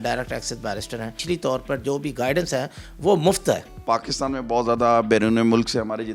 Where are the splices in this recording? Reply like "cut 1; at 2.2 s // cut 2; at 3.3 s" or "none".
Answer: cut 1; at 1.2 s // cut 2; at 3.7 s